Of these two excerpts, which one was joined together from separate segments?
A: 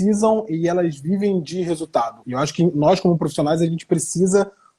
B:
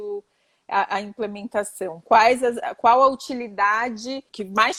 A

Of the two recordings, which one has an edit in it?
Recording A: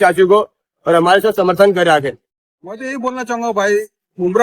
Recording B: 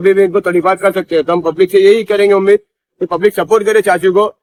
A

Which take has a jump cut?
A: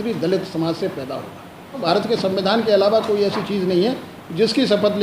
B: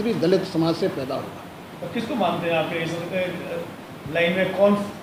A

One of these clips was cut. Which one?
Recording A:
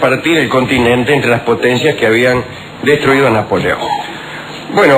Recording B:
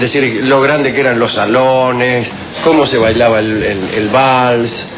B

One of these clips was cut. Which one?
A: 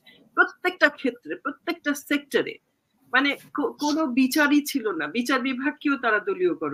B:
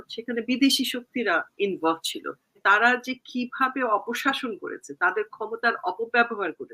B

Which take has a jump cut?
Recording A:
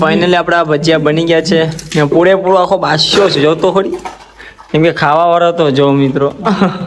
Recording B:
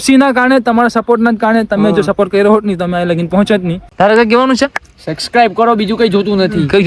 B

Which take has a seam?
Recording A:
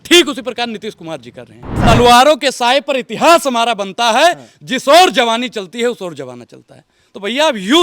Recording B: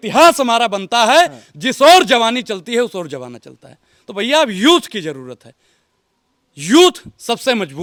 A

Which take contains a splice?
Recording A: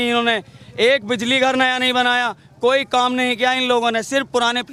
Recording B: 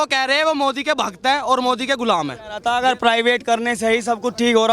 B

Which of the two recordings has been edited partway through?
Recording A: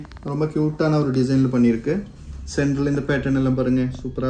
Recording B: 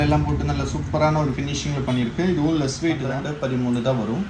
B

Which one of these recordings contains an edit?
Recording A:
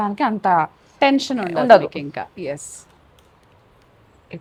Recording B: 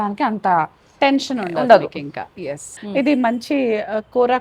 B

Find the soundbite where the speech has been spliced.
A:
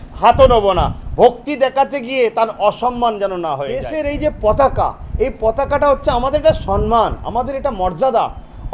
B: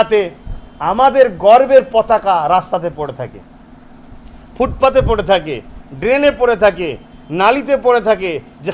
A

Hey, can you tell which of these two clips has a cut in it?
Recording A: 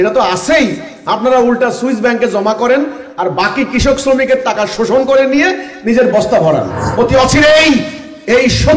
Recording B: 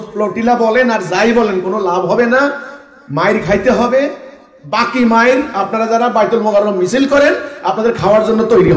A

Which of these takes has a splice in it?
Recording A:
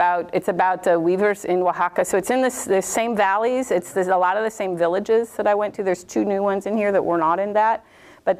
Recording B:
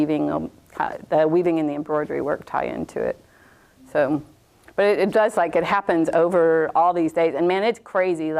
B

